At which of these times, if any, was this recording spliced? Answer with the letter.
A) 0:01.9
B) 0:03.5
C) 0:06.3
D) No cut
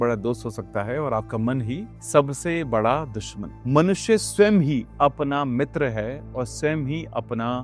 B